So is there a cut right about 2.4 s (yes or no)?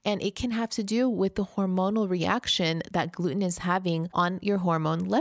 no